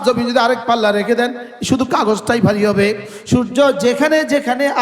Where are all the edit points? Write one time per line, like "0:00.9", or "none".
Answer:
0:03.1